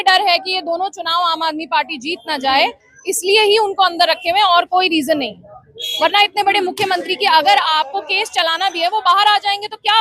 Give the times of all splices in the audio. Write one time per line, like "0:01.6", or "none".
none